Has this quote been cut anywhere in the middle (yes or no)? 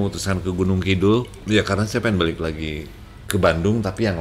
yes